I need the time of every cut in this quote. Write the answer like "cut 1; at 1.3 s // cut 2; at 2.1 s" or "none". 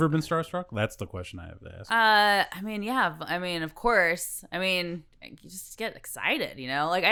none

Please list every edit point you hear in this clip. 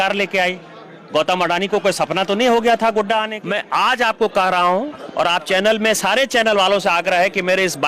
cut 1; at 3.4 s

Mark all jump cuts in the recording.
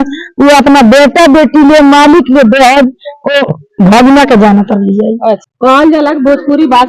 cut 1; at 5.5 s

